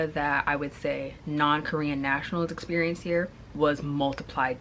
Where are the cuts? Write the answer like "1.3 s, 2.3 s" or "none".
3.4 s